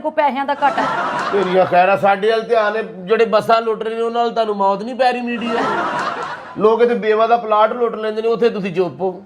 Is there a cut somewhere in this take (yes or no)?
no